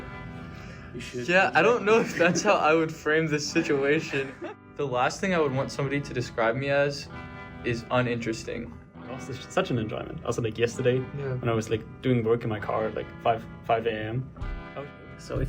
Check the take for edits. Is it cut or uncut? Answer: cut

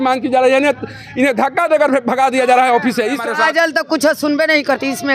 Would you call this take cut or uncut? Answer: cut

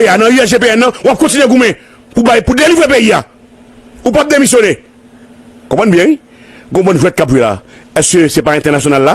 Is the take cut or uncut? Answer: uncut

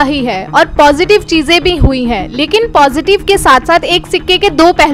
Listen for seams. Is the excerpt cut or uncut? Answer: uncut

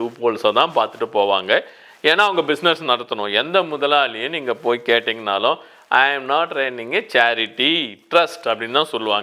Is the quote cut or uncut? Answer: uncut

